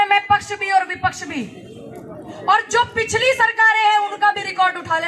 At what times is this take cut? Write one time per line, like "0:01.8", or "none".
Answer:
none